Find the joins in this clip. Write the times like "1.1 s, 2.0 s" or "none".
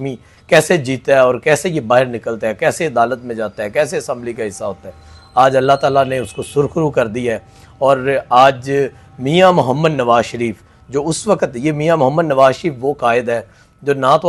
none